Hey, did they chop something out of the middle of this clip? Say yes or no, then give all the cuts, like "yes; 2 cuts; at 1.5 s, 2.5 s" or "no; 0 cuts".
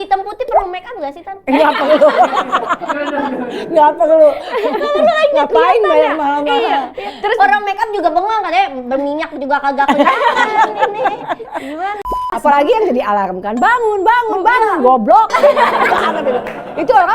yes; 1 cut; at 12.0 s